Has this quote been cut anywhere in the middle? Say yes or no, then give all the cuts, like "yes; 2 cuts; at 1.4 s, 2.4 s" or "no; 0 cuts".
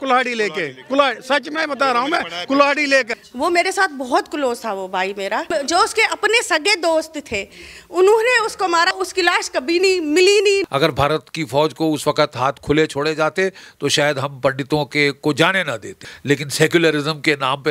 yes; 5 cuts; at 3.2 s, 5.5 s, 8.9 s, 10.6 s, 16.1 s